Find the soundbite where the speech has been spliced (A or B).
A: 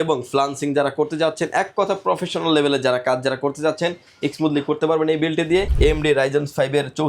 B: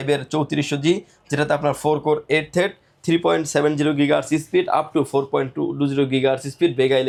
A